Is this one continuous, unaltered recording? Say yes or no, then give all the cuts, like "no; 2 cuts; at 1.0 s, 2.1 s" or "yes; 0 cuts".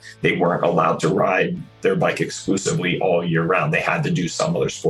yes; 0 cuts